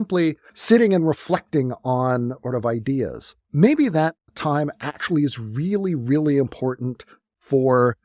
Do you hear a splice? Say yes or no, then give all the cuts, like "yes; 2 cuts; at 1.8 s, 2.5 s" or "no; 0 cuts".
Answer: no; 0 cuts